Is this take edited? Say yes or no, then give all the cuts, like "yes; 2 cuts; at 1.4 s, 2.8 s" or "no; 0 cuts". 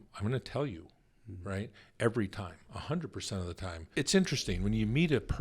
yes; 1 cut; at 3.9 s